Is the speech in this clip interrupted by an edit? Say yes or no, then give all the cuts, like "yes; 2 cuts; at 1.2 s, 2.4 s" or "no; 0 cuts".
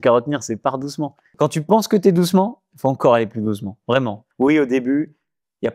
yes; 2 cuts; at 1.2 s, 4.2 s